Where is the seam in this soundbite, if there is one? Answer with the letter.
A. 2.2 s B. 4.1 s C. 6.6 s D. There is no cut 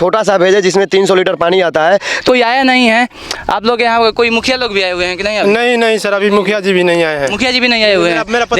A